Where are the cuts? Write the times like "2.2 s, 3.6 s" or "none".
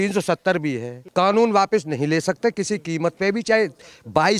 1.0 s